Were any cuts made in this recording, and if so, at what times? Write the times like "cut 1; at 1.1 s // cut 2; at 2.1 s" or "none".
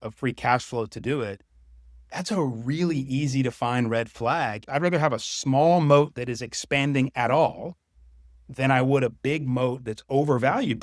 cut 1; at 4.6 s